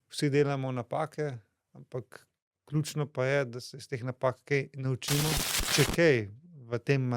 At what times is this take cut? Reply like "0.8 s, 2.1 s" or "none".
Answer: 5.6 s